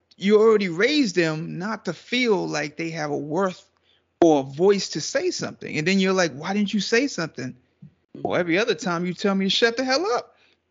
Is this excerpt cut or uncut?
uncut